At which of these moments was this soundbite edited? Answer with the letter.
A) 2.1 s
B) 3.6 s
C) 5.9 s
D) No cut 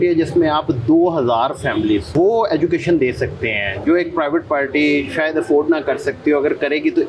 A